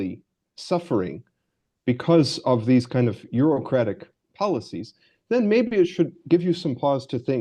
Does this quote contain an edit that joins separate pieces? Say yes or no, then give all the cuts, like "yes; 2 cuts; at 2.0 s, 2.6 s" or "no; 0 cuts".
no; 0 cuts